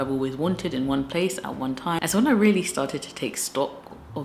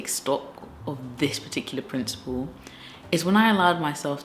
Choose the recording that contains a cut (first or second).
first